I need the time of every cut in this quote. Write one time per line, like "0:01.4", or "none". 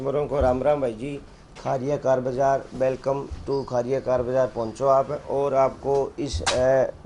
none